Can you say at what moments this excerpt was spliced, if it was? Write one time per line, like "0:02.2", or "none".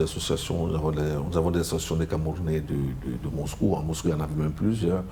none